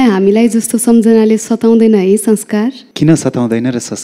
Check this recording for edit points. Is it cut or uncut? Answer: cut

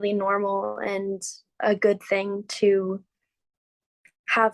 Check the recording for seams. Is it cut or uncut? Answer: uncut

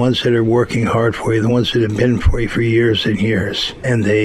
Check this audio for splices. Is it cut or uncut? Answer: uncut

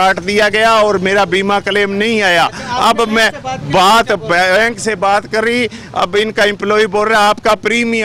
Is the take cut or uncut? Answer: uncut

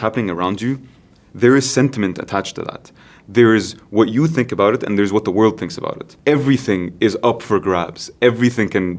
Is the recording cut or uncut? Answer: uncut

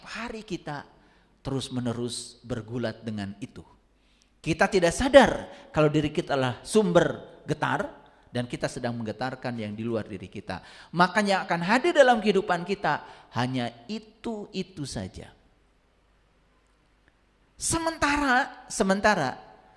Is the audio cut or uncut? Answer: uncut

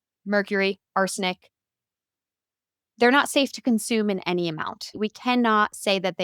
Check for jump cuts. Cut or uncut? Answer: cut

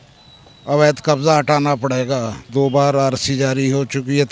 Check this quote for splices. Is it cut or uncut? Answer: cut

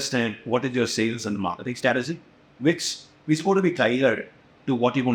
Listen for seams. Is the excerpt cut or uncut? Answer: uncut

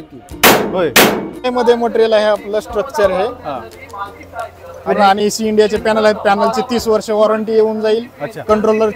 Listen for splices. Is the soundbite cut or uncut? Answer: cut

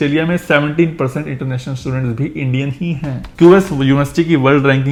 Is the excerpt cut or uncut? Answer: uncut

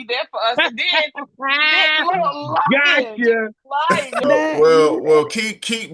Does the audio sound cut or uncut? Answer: cut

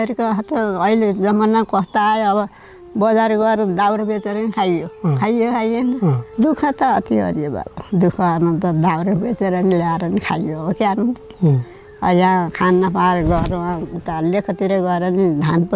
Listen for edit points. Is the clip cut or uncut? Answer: cut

